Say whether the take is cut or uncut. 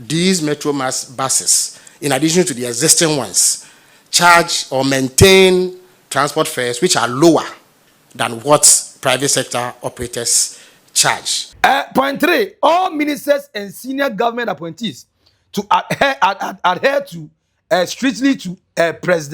cut